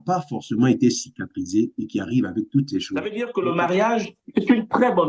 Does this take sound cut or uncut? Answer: cut